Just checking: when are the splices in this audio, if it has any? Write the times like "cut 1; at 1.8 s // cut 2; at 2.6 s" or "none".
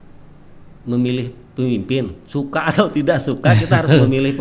none